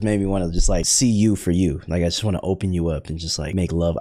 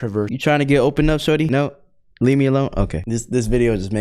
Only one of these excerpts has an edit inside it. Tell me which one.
second; 1 cut; at 3.0 s

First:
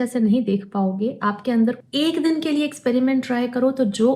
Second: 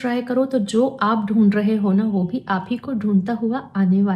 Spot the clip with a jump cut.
first; 1 cut; at 1.8 s

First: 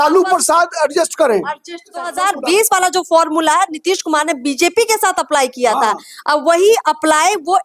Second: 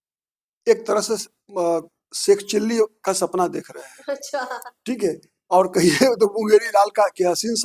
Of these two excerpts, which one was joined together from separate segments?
first; 1 cut; at 2.1 s

